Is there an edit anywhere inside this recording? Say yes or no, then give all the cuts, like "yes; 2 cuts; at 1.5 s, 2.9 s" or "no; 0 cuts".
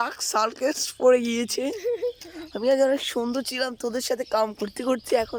no; 0 cuts